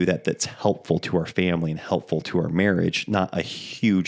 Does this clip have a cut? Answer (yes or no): no